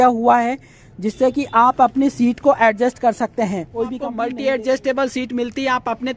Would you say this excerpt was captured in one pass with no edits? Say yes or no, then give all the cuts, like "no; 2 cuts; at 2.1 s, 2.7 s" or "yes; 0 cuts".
no; 1 cut; at 4.0 s